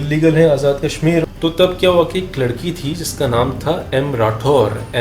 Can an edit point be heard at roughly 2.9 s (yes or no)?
no